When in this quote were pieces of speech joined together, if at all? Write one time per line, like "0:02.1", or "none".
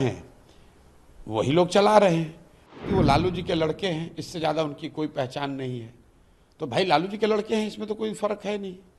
0:02.8